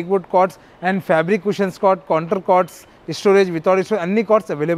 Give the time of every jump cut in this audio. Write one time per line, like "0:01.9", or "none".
none